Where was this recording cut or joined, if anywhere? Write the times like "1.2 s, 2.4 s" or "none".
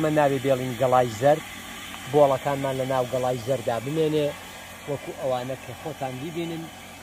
none